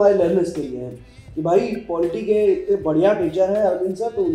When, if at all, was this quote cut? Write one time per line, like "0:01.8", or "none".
none